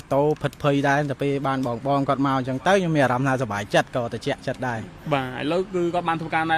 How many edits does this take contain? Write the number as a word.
zero